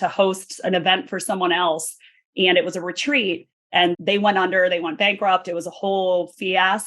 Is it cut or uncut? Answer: cut